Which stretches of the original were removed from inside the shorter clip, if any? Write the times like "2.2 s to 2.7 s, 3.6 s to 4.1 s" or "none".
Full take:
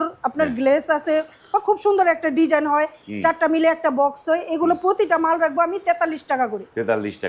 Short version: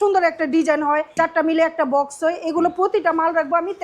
2.9 s to 3.1 s